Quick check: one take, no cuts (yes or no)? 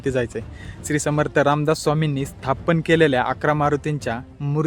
yes